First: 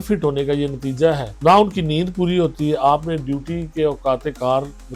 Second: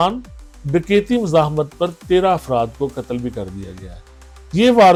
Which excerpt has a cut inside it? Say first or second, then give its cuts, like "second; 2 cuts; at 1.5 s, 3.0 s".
first; 1 cut; at 1.3 s